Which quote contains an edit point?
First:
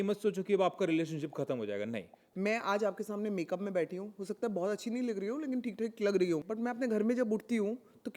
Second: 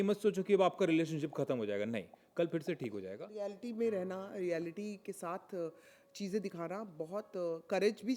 first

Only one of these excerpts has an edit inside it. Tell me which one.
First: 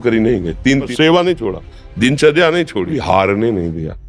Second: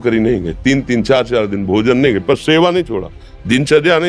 first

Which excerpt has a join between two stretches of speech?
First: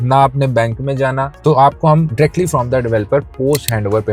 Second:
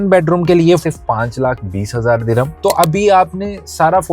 second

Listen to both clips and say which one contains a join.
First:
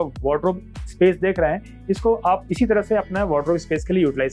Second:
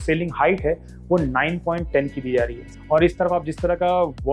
second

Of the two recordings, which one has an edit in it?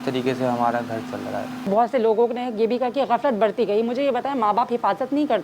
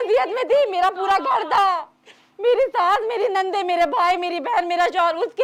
first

